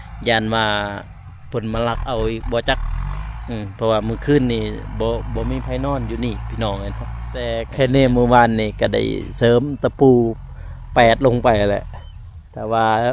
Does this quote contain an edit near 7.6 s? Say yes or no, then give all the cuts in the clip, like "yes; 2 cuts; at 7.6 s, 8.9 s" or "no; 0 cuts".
yes; 1 cut; at 7.6 s